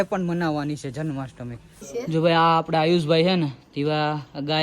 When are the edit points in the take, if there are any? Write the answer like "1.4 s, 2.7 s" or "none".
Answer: 1.8 s